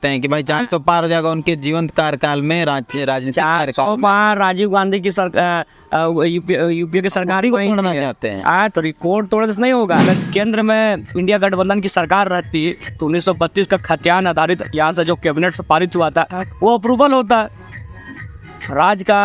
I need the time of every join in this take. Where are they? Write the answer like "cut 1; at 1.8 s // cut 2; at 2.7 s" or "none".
cut 1; at 10.2 s